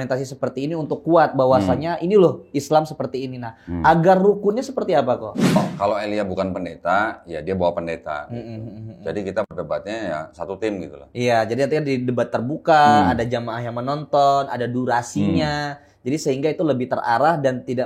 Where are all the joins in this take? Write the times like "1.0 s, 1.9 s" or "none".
5.6 s